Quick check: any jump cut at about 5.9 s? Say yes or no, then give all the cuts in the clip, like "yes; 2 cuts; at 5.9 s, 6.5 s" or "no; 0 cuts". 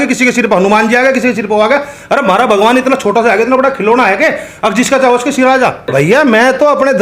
yes; 1 cut; at 5.9 s